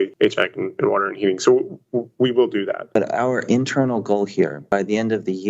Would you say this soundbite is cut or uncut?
cut